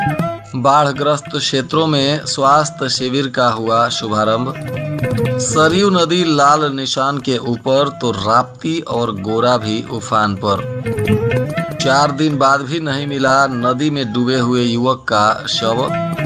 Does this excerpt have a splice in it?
no; 0 cuts

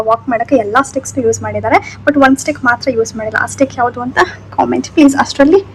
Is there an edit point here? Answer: no; 0 cuts

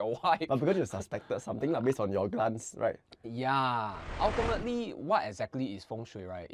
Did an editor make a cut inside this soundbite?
yes; 1 cut; at 4.1 s

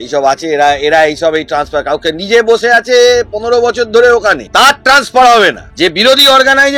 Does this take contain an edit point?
yes; 2 cuts; at 4.4 s, 5.6 s

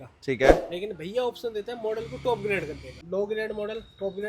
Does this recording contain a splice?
yes; 1 cut; at 2.9 s

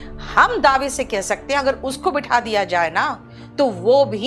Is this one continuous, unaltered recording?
yes; 0 cuts

